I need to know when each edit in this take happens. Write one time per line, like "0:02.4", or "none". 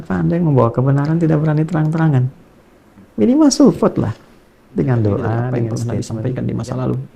0:05.8